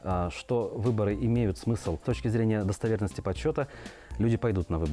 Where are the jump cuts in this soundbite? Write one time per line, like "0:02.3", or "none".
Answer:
none